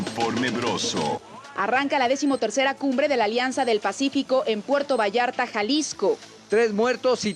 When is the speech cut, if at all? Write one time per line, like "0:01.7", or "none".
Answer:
0:01.3
0:06.3